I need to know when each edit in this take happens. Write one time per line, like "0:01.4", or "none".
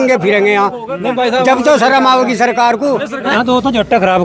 0:03.3